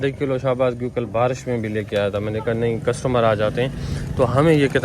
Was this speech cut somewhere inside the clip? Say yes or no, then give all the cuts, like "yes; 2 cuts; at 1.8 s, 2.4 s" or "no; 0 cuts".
no; 0 cuts